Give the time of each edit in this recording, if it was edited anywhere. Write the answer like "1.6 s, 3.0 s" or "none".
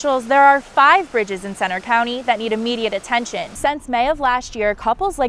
3.5 s